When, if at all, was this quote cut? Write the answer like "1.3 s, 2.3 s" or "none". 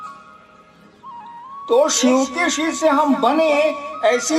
1.7 s